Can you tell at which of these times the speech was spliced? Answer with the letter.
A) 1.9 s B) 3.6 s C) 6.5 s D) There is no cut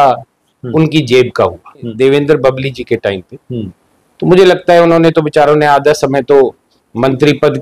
A